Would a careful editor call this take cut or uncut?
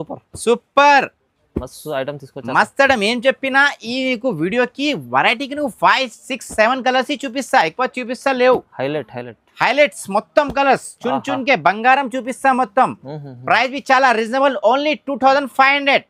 uncut